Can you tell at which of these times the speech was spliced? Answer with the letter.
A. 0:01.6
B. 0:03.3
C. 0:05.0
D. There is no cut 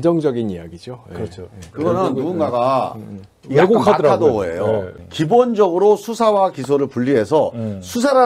C